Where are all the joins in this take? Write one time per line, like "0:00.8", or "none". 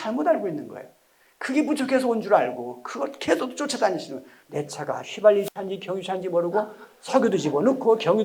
0:04.4